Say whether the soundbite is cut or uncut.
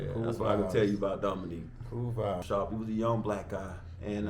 cut